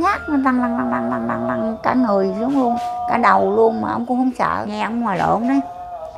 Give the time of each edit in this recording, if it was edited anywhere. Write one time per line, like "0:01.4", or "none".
0:04.7